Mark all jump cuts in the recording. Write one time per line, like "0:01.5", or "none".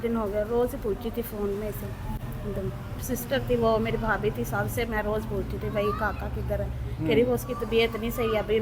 none

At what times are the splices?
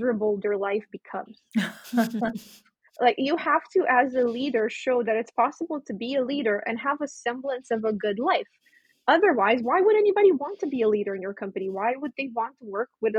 none

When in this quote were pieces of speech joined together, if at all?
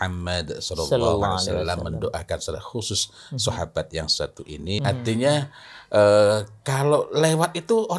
0:04.8

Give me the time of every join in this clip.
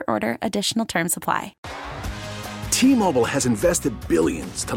0:01.6

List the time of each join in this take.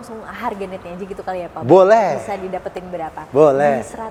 none

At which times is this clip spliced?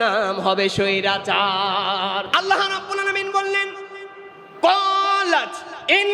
0:02.3

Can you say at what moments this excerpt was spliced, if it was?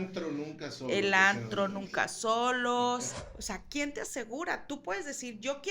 0:03.1

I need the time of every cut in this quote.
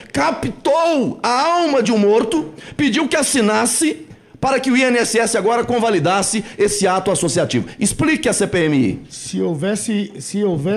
none

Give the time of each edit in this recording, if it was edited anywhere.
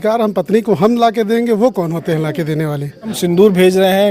0:03.2

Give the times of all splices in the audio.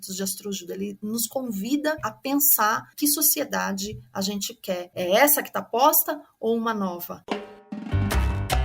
0:07.1

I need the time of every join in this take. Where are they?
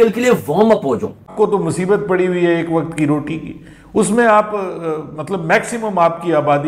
0:01.2

